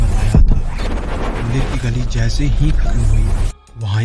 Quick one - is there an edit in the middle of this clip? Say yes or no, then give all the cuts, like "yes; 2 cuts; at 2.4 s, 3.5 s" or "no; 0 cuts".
yes; 1 cut; at 1.2 s